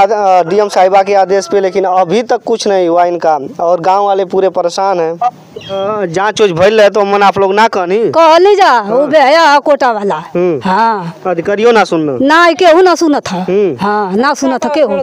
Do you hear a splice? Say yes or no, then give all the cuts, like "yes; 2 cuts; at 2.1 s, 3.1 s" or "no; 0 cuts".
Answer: yes; 1 cut; at 5.8 s